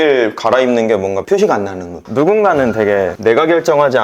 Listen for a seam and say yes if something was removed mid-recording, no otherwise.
yes